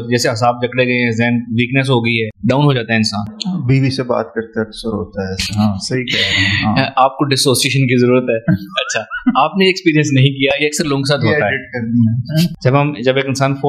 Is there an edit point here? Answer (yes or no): yes